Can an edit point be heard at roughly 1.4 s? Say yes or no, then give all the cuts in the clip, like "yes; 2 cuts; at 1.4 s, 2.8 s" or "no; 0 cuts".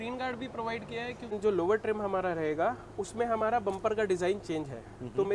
yes; 1 cut; at 1.4 s